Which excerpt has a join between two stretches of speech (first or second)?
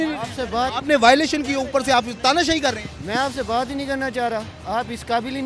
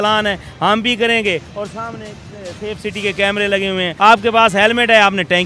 second